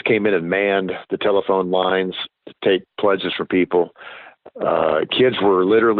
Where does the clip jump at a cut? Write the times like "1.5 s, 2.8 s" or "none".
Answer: none